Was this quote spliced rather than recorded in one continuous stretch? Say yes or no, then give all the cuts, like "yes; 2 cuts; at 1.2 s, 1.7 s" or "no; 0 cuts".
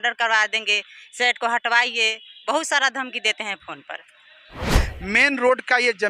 yes; 1 cut; at 4.8 s